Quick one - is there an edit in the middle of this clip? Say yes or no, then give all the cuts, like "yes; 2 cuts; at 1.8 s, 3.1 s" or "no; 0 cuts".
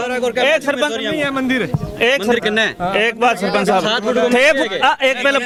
no; 0 cuts